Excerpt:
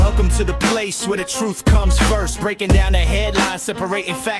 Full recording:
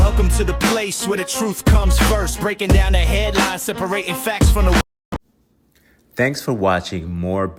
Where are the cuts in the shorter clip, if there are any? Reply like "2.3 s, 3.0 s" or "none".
none